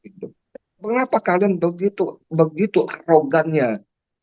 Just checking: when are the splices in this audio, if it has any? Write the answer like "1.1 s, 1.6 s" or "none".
0.9 s